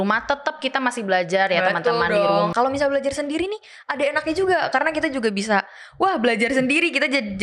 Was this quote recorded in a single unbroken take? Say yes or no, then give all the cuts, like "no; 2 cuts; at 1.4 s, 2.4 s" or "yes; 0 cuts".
no; 1 cut; at 2.5 s